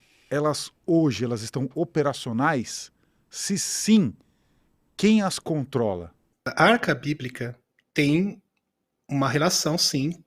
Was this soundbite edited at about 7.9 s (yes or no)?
no